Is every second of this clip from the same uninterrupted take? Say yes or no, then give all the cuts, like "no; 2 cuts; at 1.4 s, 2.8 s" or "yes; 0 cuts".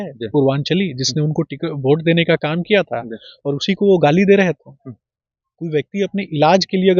yes; 0 cuts